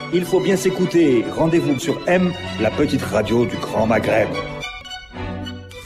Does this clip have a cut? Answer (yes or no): yes